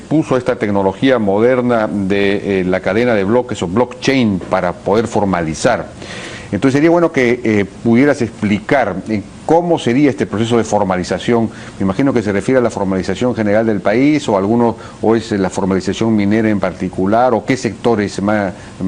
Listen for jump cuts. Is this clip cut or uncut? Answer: cut